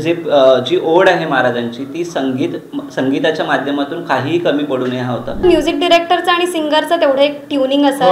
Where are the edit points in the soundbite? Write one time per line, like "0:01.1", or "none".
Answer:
0:05.4